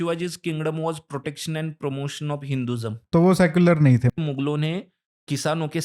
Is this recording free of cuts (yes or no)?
no